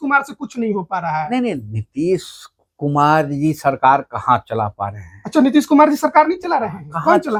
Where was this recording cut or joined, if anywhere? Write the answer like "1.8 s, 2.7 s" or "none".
none